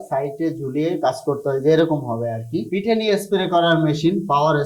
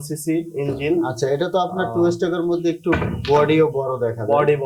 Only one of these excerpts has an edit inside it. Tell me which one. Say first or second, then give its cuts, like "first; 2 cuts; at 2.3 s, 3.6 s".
first; 1 cut; at 2.6 s